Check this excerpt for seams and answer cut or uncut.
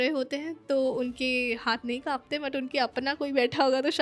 uncut